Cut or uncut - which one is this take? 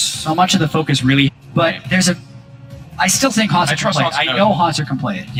uncut